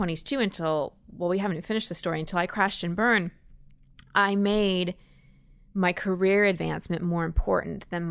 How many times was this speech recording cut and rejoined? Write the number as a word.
zero